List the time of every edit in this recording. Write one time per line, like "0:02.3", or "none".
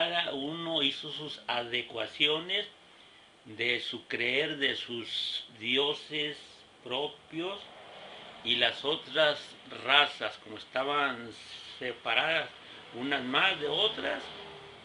none